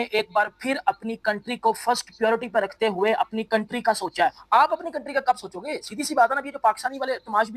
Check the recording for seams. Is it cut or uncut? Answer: cut